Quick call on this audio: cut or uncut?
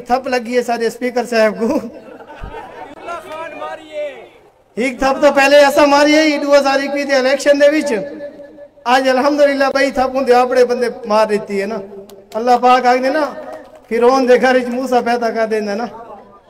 uncut